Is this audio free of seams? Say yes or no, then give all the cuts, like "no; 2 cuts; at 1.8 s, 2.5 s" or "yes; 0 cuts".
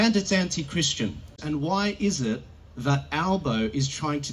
no; 1 cut; at 1.4 s